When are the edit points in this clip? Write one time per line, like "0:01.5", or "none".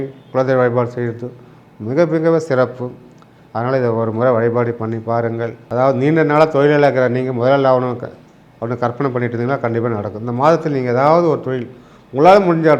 0:05.6